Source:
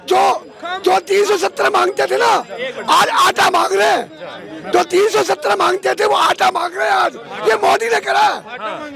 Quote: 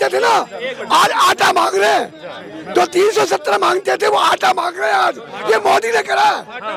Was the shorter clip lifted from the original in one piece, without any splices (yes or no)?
yes